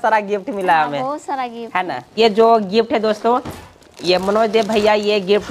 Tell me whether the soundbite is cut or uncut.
cut